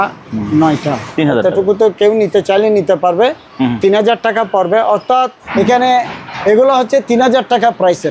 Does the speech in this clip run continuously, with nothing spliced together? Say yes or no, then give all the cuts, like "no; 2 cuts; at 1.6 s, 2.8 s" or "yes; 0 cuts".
no; 2 cuts; at 1.0 s, 5.4 s